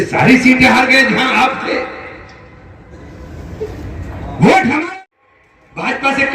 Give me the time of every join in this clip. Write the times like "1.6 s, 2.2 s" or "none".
4.9 s